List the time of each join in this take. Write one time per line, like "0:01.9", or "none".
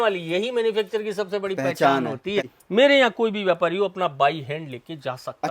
0:02.5

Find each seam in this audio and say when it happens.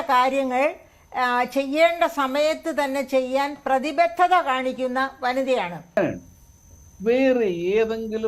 0:06.0

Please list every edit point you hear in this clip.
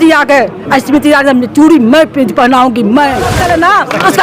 0:03.3

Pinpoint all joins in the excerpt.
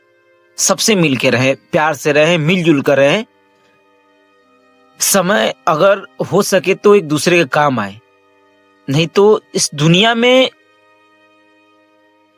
none

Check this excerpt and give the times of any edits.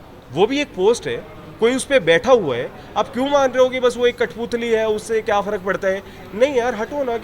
none

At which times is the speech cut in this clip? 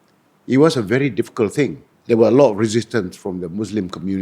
0:01.9

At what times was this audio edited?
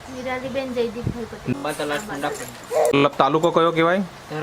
0:01.5
0:03.0

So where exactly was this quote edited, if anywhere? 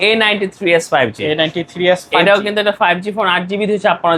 none

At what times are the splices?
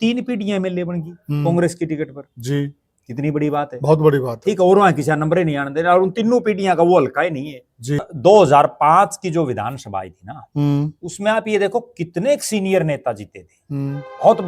0:08.1

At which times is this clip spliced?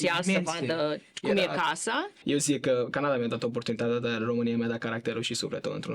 0:02.1

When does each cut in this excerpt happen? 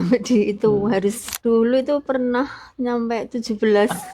0:01.3

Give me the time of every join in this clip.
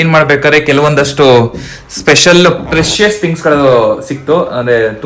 none

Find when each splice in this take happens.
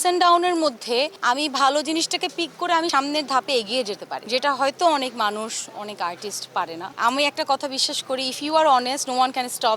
0:01.2
0:02.9
0:04.1
0:06.8

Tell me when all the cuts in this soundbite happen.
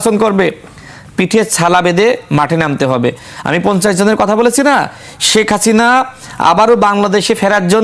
none

